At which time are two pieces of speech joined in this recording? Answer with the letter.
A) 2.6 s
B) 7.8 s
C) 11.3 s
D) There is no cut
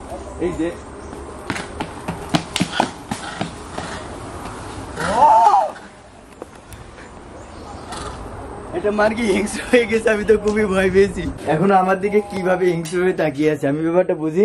C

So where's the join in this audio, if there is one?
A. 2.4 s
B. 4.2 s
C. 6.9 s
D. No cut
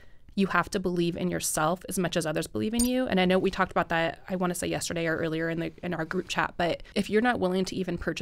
C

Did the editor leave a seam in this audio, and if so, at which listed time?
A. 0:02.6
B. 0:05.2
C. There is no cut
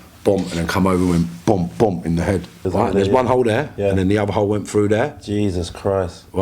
A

